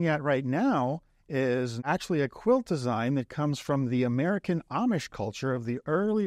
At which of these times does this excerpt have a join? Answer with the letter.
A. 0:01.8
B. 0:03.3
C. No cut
A